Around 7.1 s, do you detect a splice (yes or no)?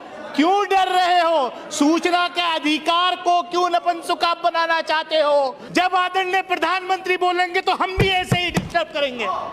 no